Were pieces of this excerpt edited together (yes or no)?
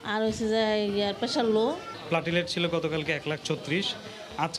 yes